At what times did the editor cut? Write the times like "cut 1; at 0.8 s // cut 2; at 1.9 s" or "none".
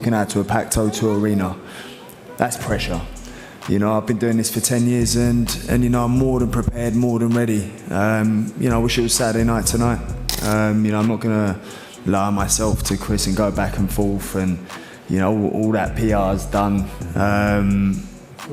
cut 1; at 10.2 s

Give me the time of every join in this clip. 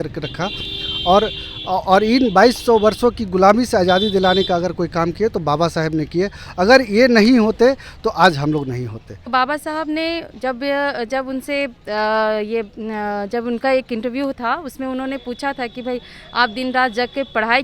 cut 1; at 9.3 s

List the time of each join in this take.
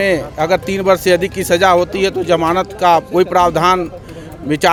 none

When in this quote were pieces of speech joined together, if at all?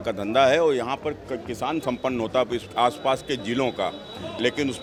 none

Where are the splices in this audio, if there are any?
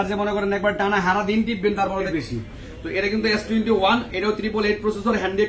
cut 1; at 2.1 s

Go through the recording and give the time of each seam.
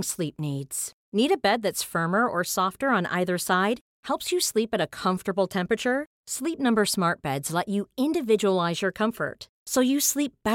none

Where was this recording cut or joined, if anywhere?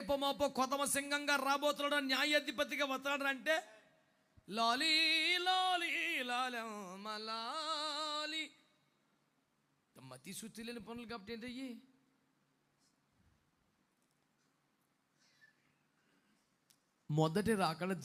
none

